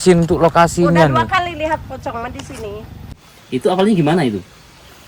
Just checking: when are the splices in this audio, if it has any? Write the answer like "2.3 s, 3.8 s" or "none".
3.1 s